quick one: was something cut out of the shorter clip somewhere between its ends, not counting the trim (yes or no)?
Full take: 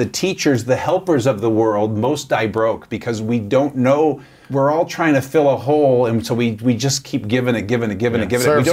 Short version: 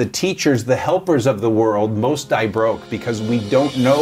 no